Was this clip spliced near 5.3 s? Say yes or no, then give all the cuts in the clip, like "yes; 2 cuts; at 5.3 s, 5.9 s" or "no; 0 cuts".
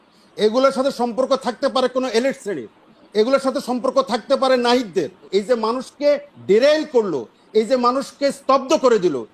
yes; 1 cut; at 5.3 s